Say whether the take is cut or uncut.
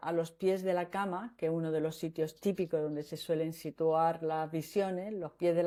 uncut